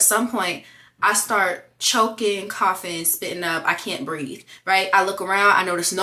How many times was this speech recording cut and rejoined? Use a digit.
0